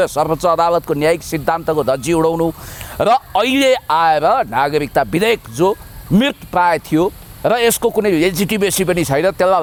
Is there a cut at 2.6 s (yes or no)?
no